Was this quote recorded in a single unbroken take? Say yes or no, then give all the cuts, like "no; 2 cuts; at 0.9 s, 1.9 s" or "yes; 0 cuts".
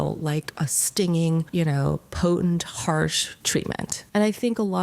no; 2 cuts; at 1.5 s, 3.8 s